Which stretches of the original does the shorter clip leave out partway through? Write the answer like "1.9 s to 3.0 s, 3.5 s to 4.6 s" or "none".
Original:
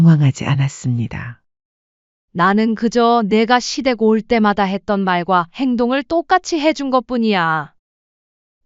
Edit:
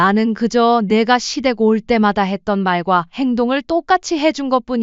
none